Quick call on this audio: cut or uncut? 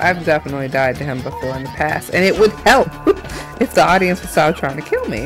uncut